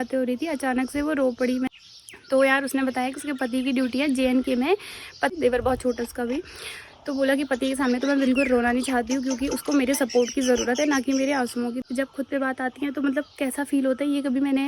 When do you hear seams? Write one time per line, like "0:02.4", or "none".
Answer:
0:01.7
0:05.3
0:11.8